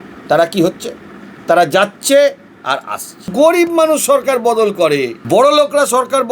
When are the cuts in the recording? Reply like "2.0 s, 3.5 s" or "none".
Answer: 3.2 s, 5.2 s